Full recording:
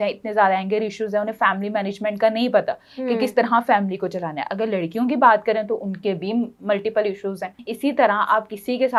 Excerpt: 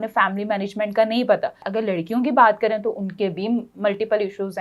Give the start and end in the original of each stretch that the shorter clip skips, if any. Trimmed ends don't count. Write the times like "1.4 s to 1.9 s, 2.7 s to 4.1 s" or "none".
2.9 s to 4.5 s

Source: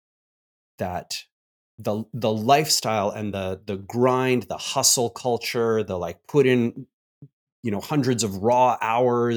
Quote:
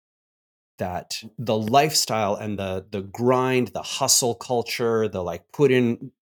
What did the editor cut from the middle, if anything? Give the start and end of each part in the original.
1.3 s to 2.1 s

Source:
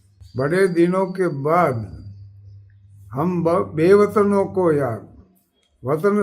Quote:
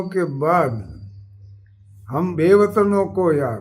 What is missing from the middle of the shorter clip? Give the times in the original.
3.4 s to 3.7 s

